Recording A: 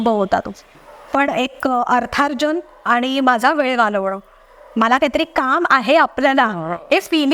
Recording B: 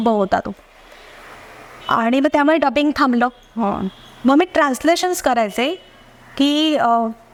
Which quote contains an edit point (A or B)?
A